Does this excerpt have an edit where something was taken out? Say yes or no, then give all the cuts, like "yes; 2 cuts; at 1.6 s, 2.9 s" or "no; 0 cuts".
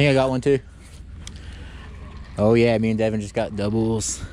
no; 0 cuts